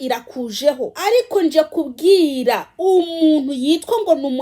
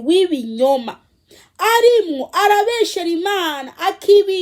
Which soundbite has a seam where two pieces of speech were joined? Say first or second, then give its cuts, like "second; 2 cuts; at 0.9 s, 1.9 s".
first; 1 cut; at 0.9 s